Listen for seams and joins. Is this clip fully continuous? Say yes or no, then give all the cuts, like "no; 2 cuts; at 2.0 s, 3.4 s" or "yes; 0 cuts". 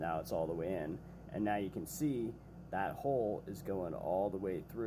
yes; 0 cuts